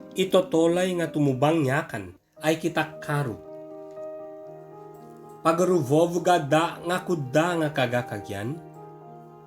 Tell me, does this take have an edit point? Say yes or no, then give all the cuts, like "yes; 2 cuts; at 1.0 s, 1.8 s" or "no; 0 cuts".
yes; 3 cuts; at 3.4 s, 5.4 s, 8.6 s